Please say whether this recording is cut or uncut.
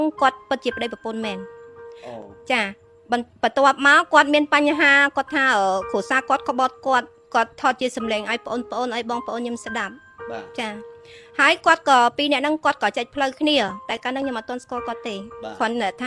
uncut